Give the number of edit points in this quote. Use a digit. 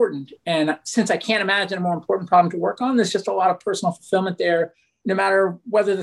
1